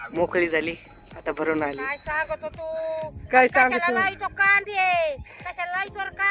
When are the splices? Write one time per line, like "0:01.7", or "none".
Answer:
0:01.9